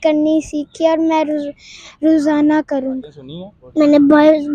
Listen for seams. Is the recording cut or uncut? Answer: cut